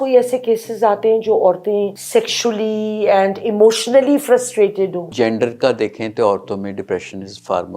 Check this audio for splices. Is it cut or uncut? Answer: cut